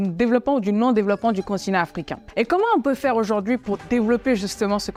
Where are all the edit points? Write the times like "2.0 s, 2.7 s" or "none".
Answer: none